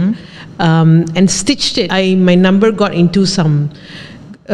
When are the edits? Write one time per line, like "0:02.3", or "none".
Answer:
0:01.9